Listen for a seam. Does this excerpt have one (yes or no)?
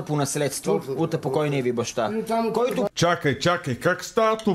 yes